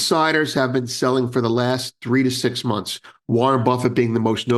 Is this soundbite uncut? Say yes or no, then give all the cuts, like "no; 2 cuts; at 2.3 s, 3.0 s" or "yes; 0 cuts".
yes; 0 cuts